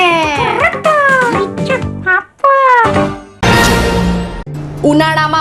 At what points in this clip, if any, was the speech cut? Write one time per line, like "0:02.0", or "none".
0:03.3